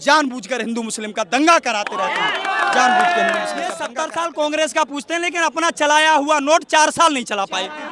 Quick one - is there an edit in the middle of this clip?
yes; 1 cut; at 3.9 s

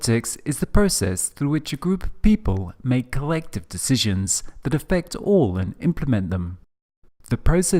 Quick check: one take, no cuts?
yes; 0 cuts

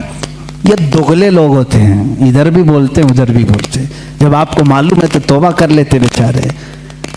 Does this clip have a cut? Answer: no; 0 cuts

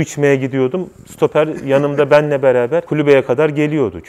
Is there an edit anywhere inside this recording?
no; 0 cuts

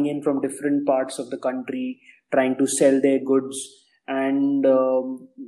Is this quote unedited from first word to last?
yes; 0 cuts

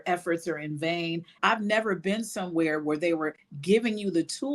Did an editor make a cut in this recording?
yes; 1 cut; at 1.3 s

